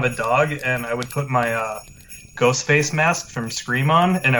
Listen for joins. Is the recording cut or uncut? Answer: uncut